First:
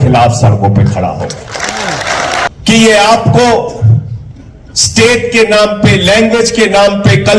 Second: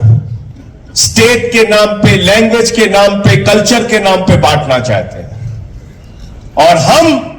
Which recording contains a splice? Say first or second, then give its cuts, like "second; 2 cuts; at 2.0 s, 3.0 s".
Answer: first; 1 cut; at 2.5 s